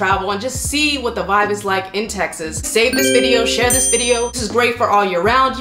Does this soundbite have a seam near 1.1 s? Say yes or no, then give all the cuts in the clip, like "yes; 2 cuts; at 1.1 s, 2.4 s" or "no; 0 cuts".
no; 2 cuts; at 2.7 s, 4.4 s